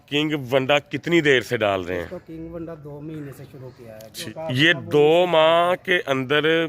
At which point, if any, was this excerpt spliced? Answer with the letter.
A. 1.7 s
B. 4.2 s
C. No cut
B